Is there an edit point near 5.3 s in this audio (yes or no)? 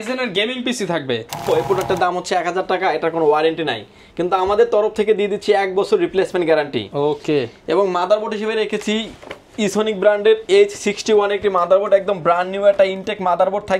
no